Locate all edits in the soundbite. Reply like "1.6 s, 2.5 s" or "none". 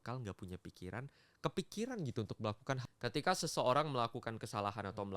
2.8 s